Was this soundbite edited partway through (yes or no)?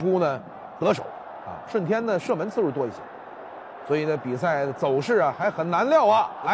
yes